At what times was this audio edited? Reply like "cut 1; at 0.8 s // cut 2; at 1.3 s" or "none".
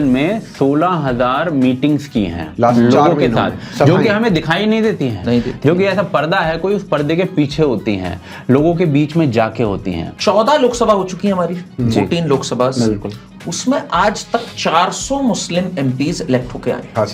cut 1; at 10.1 s